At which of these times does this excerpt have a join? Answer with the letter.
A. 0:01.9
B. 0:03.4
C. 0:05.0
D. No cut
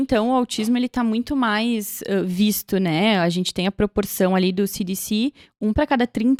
D